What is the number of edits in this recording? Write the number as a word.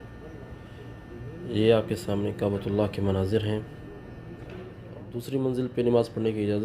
one